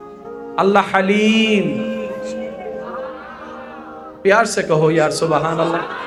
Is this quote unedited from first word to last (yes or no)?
yes